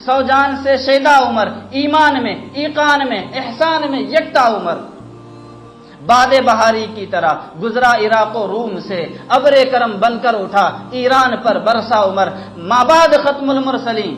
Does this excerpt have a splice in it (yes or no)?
no